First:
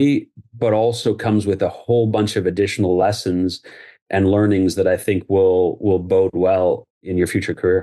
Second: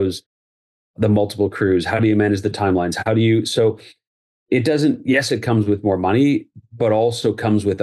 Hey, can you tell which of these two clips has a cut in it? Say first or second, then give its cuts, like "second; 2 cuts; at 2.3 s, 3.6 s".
first; 1 cut; at 6.9 s